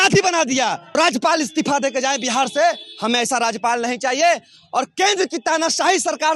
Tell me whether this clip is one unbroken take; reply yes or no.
no